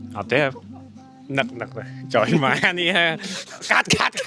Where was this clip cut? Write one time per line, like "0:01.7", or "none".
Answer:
none